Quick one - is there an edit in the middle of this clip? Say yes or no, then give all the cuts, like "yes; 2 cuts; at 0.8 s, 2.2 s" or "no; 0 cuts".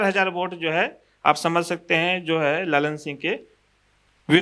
no; 0 cuts